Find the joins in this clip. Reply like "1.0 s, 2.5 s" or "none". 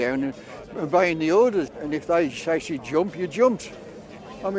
1.7 s